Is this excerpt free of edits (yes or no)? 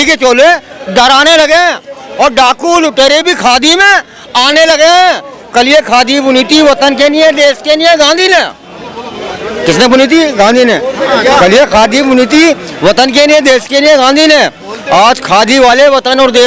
yes